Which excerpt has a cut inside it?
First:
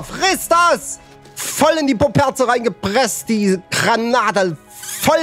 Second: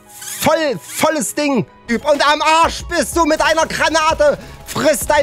second; 1 cut; at 1.9 s

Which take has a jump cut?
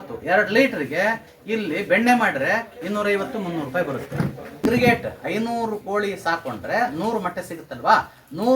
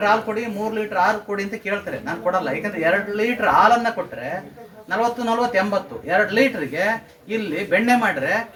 first; 1 cut; at 4.7 s

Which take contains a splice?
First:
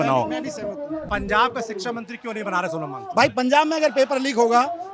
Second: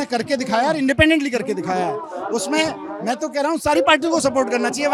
first; 1 cut; at 1.1 s

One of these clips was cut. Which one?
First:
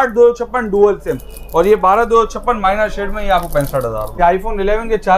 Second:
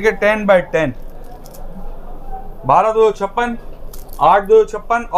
first; 1 cut; at 4.1 s

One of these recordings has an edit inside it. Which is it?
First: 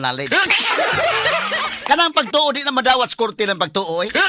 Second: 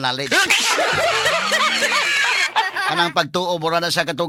first; 1 cut; at 1.6 s

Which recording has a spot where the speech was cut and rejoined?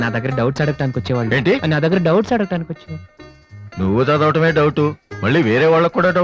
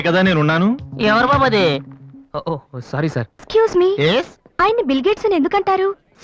second; 1 cut; at 3.4 s

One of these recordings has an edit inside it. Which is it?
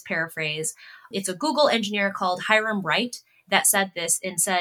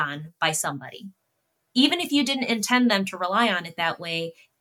first; 1 cut; at 1.1 s

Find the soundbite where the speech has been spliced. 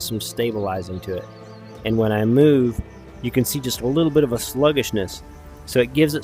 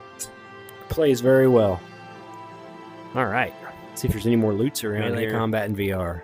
second; 1 cut; at 5.0 s

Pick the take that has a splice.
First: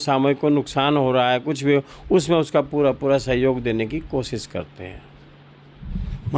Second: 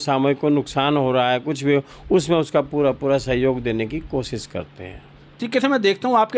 second; 1 cut; at 5.4 s

